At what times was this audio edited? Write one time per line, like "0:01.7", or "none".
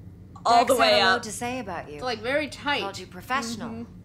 none